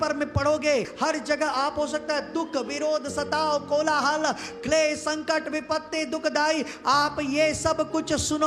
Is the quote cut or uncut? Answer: cut